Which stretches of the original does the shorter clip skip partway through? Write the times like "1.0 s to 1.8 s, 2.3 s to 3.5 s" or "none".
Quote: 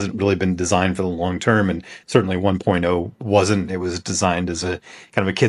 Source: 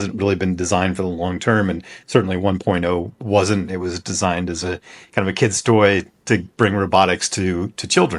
none